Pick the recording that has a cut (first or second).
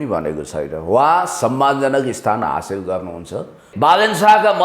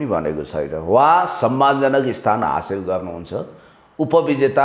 first